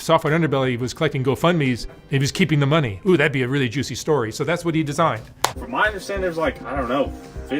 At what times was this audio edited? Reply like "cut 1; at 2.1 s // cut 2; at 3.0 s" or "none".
cut 1; at 2.0 s // cut 2; at 5.6 s